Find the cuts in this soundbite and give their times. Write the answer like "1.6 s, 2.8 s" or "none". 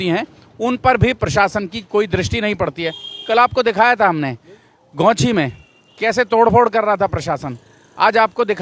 none